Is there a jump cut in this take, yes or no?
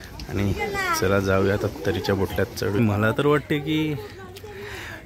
yes